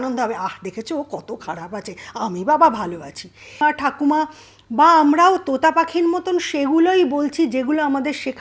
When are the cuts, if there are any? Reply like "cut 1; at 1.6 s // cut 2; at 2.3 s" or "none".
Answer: cut 1; at 3.6 s